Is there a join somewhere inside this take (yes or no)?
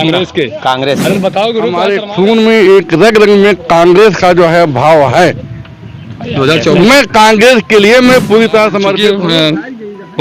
yes